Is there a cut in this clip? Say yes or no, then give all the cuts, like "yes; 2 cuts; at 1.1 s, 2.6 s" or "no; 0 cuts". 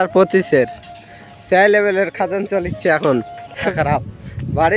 yes; 1 cut; at 3.6 s